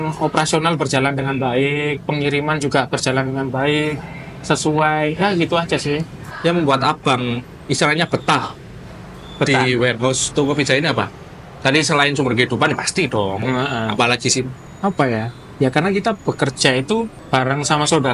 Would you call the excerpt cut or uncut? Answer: cut